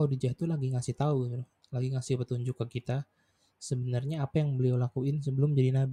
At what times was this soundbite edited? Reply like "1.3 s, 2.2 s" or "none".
none